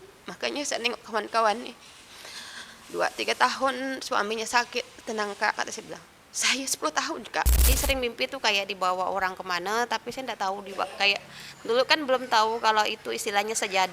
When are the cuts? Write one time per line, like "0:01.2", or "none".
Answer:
0:07.7